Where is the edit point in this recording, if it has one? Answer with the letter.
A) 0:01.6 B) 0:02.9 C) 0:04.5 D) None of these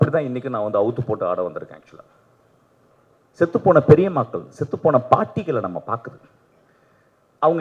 B